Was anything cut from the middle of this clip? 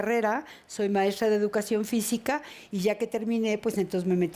no; 0 cuts

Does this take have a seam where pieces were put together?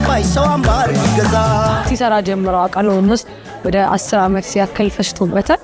yes; 1 cut; at 1.9 s

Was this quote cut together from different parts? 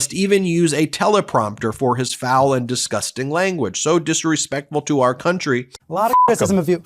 yes; 1 cut; at 5.8 s

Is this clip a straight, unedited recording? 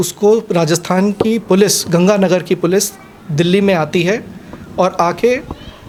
yes; 0 cuts

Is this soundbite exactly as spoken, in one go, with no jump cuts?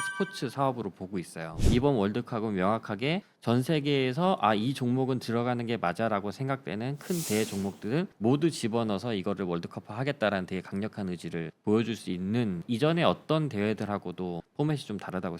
no; 2 cuts; at 1.6 s, 12.6 s

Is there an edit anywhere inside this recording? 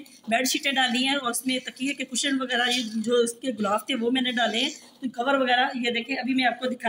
no; 0 cuts

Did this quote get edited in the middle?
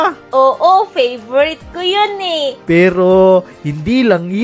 yes; 1 cut; at 2.5 s

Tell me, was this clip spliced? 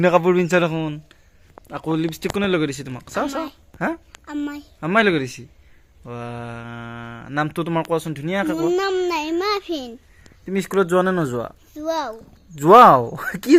no; 0 cuts

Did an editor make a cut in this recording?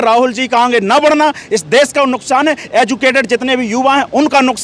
no; 0 cuts

